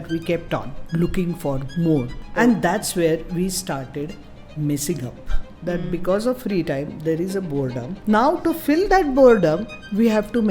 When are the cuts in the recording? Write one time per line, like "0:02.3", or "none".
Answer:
0:02.2
0:05.5
0:07.9